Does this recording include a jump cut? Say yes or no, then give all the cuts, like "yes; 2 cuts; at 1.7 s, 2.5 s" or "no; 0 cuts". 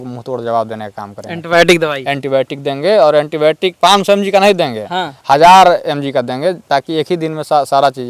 no; 0 cuts